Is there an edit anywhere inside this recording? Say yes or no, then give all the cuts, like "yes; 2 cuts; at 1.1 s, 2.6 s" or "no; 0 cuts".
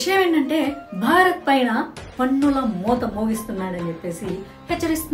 no; 0 cuts